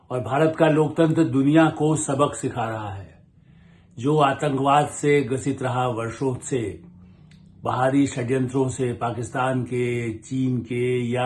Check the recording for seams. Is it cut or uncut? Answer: uncut